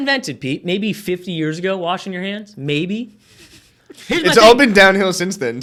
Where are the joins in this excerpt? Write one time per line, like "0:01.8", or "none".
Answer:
none